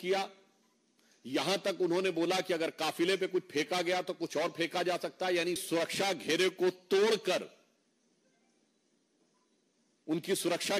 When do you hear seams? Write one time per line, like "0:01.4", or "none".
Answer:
0:05.6